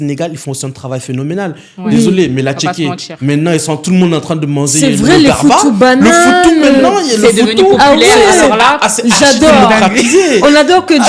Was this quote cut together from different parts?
no; 0 cuts

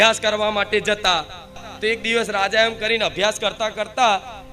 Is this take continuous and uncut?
no; 1 cut; at 1.7 s

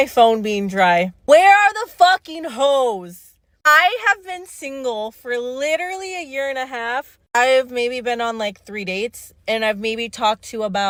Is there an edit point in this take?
no; 0 cuts

